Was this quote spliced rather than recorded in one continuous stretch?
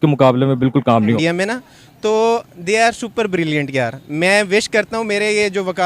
yes; 1 cut; at 1.2 s

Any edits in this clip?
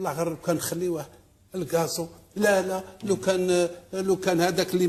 no; 0 cuts

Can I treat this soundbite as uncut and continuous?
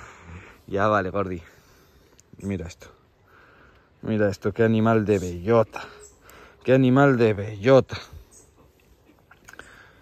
yes; 0 cuts

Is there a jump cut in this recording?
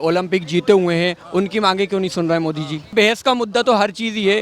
no; 0 cuts

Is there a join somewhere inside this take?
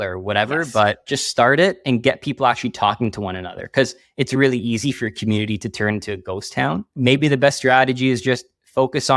yes; 2 cuts; at 1.0 s, 6.9 s

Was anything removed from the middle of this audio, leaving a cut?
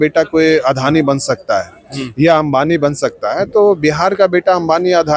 no; 0 cuts

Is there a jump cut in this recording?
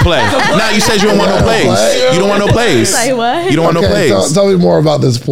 no; 0 cuts

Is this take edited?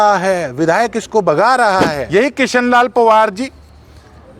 yes; 1 cut; at 2.0 s

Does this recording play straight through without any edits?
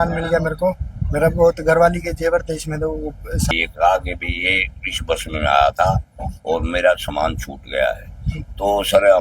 no; 1 cut; at 3.5 s

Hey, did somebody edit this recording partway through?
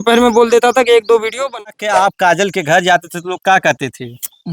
yes; 1 cut; at 1.5 s

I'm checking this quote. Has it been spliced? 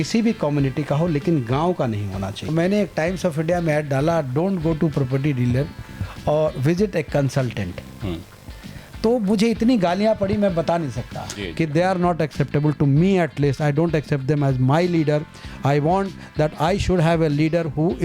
yes; 2 cuts; at 2.5 s, 11.3 s

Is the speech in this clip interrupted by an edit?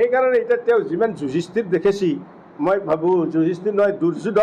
no; 0 cuts

